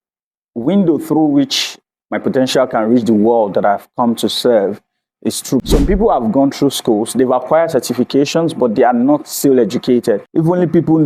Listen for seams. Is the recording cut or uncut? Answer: cut